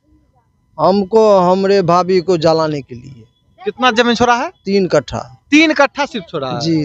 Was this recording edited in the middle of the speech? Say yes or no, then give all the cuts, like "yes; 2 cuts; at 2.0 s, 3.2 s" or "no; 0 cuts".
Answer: no; 0 cuts